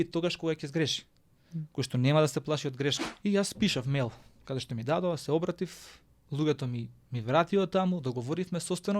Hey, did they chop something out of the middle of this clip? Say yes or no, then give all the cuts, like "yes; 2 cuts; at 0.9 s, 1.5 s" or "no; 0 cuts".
yes; 1 cut; at 3.1 s